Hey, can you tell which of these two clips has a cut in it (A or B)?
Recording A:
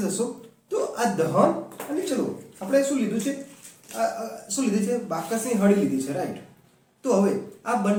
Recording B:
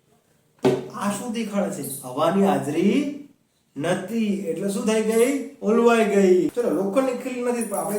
B